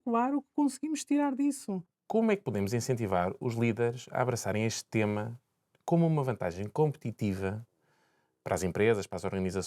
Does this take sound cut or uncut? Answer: cut